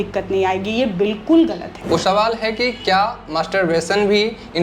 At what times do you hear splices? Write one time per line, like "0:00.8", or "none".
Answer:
0:01.7